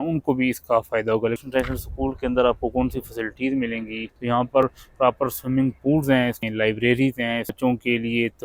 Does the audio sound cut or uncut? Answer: cut